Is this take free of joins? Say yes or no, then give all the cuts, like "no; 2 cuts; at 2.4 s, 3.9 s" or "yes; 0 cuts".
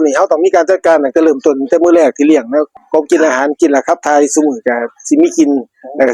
no; 1 cut; at 2.7 s